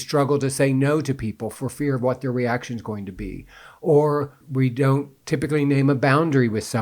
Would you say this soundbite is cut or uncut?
cut